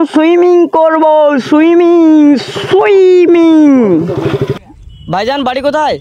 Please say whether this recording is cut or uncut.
uncut